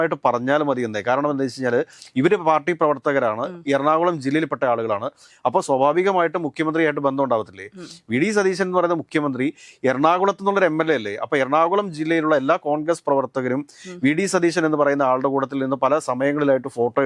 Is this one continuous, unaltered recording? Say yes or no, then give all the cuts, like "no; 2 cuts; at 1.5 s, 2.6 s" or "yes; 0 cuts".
yes; 0 cuts